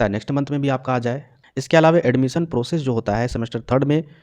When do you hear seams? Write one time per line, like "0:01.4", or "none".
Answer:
0:01.3